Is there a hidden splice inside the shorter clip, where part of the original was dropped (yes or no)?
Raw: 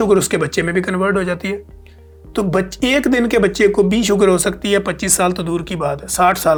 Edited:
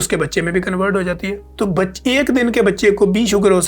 yes